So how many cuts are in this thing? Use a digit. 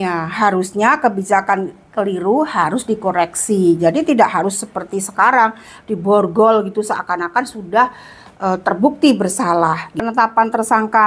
1